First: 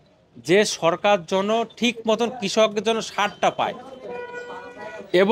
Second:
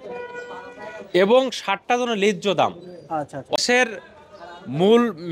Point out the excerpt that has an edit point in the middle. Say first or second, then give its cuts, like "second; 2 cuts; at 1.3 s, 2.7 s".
second; 1 cut; at 3.6 s